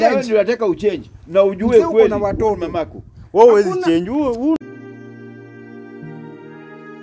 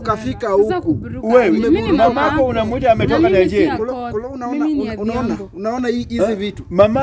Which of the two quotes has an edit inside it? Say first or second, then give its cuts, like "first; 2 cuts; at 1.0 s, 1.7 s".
first; 1 cut; at 4.6 s